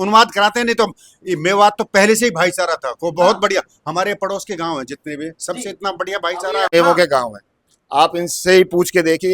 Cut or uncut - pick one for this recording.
cut